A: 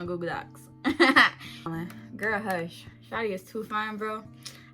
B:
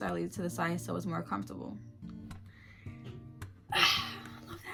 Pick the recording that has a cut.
A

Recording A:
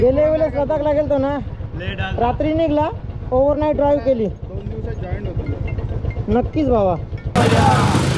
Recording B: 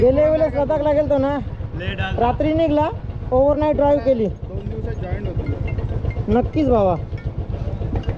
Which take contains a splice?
A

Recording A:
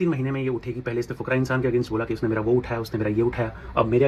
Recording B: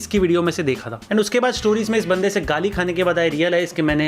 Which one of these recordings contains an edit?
B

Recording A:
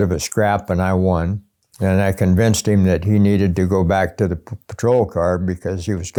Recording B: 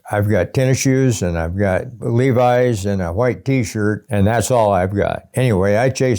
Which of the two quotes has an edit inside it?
B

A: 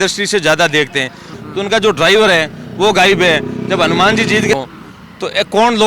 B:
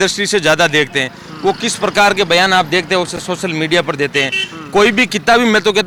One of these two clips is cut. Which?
A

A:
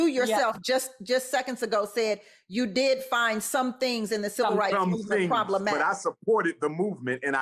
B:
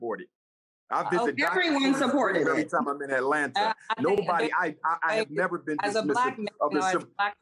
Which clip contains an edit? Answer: B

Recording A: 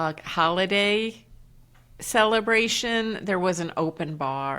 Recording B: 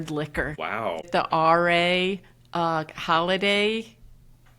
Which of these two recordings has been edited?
B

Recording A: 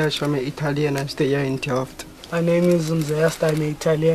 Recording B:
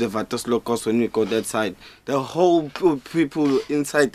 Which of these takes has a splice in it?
B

